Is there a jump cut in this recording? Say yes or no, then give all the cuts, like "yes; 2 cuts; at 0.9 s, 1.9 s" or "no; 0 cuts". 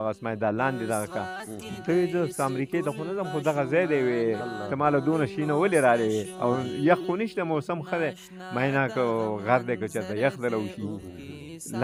no; 0 cuts